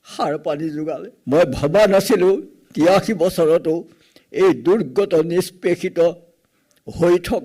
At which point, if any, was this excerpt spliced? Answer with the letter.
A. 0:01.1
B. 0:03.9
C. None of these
A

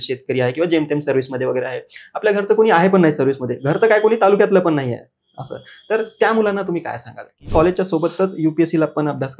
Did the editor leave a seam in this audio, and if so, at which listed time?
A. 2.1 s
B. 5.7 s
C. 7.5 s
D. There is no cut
C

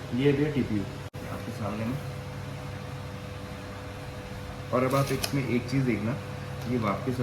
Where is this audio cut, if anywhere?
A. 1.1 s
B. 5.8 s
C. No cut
A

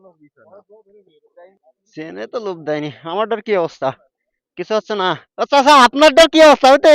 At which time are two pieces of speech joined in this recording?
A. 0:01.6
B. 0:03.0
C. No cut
A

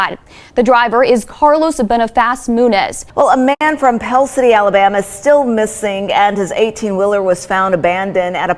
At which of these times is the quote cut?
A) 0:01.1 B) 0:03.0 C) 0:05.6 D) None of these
B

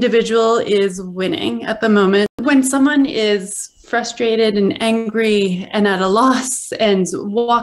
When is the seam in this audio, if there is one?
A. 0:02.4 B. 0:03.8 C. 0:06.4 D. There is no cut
A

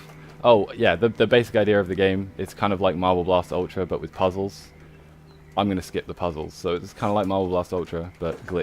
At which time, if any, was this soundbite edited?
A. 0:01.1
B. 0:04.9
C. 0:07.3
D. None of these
B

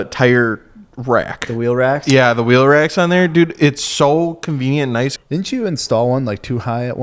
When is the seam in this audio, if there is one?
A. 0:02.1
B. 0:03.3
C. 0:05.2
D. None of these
C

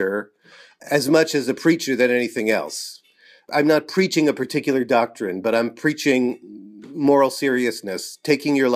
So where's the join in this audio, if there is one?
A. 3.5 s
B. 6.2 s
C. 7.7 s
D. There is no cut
A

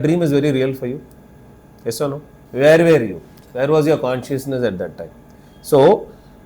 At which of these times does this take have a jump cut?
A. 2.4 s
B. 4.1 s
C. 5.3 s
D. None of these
A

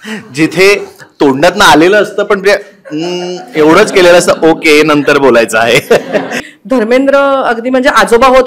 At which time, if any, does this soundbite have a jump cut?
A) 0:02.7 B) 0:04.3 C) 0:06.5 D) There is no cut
C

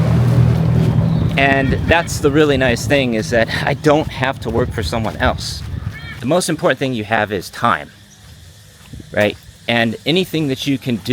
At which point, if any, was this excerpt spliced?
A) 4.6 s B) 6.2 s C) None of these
B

